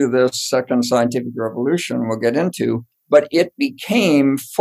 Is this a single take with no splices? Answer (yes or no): no